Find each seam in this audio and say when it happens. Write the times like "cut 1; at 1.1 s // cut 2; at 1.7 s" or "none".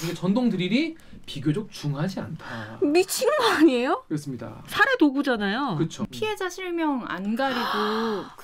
cut 1; at 6.0 s